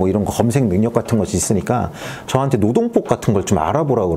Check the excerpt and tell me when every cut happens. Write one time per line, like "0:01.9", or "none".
none